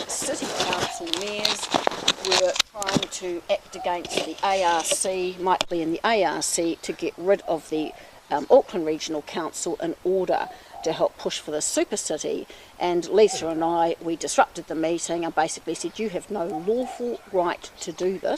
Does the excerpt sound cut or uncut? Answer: cut